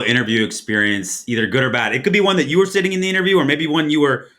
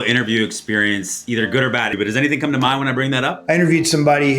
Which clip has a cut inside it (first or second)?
second